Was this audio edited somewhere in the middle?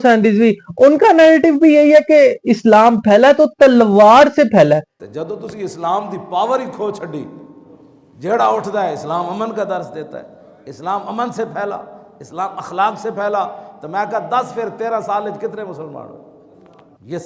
no; 0 cuts

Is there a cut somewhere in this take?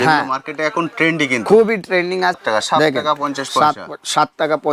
yes; 1 cut; at 2.4 s

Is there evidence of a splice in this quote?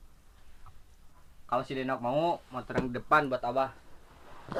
no; 0 cuts

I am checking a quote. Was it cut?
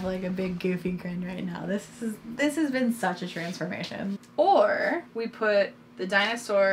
yes; 1 cut; at 4.2 s

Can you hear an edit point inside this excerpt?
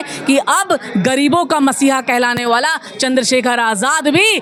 no; 0 cuts

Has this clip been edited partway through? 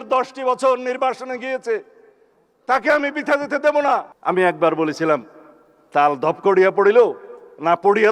yes; 1 cut; at 4.1 s

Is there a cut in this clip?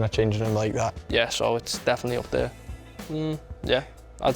yes; 1 cut; at 1.0 s

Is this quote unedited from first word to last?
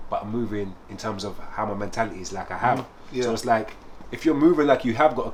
yes; 0 cuts

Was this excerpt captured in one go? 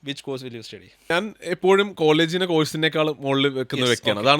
no; 1 cut; at 1.1 s

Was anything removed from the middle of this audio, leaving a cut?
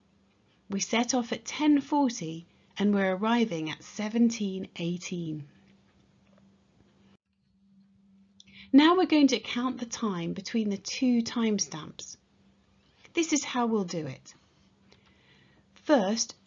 yes; 1 cut; at 4.7 s

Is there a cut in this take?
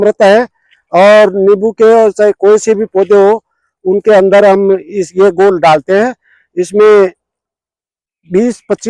no; 0 cuts

